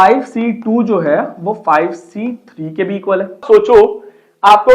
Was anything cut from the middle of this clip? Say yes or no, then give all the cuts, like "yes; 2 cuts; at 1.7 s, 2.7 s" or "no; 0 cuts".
yes; 1 cut; at 3.4 s